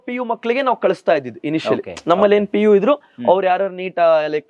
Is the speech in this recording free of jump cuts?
yes; 0 cuts

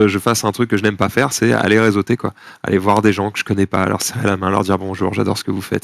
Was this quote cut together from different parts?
no; 0 cuts

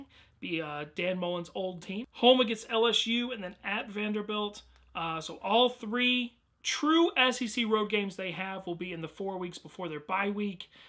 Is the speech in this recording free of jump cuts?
no; 1 cut; at 9.6 s

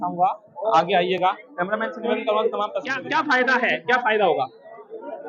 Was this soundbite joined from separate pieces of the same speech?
yes; 1 cut; at 2.9 s

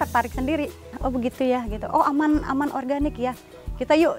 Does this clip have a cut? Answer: yes; 1 cut; at 1.0 s

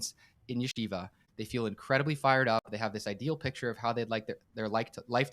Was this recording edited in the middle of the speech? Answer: yes; 1 cut; at 1.3 s

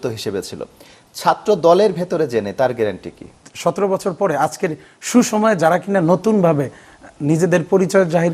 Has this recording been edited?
yes; 1 cut; at 3.4 s

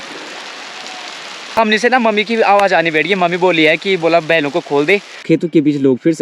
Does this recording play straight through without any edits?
no; 2 cuts; at 1.6 s, 5.2 s

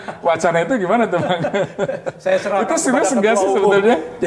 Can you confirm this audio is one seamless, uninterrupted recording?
yes; 0 cuts

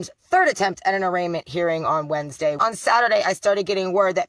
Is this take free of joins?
no; 1 cut; at 2.6 s

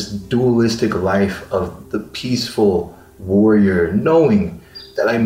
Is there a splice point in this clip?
no; 0 cuts

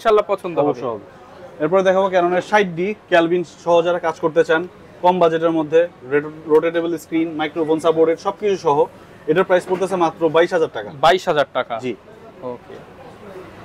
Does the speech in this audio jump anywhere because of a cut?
no; 0 cuts

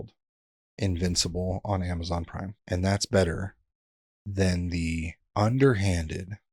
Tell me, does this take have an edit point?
yes; 2 cuts; at 2.5 s, 5.2 s

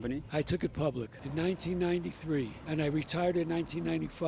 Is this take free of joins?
yes; 0 cuts

